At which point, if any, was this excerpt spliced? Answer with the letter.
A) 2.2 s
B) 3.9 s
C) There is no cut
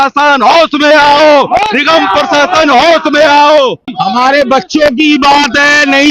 B